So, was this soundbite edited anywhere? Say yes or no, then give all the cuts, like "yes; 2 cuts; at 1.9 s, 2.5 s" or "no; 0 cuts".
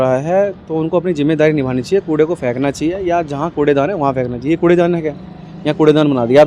no; 0 cuts